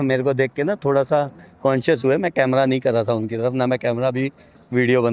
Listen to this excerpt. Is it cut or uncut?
uncut